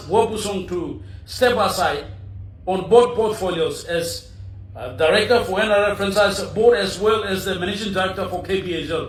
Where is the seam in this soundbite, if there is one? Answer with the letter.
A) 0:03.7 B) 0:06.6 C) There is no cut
C